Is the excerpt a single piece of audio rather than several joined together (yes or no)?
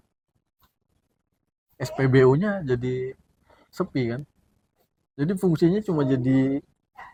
yes